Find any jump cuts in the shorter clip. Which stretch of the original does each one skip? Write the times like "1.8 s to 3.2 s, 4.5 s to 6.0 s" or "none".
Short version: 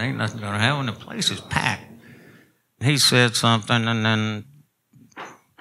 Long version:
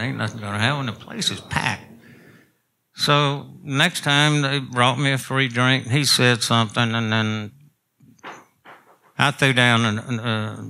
2.8 s to 5.8 s